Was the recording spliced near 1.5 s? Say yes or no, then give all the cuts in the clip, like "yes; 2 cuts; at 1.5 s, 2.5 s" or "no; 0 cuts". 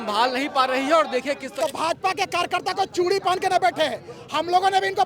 yes; 1 cut; at 1.5 s